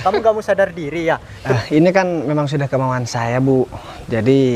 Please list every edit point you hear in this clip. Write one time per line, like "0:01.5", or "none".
0:01.5